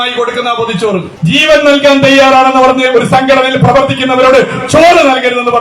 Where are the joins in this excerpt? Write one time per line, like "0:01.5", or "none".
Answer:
0:01.1